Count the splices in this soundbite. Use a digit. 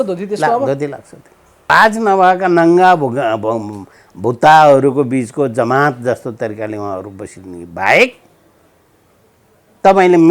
1